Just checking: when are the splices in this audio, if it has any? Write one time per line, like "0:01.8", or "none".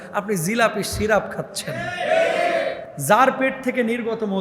0:02.8